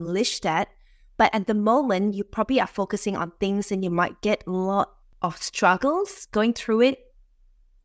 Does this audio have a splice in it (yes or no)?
yes